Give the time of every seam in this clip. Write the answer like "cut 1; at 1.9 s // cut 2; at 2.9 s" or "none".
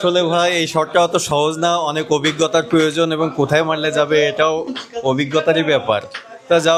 none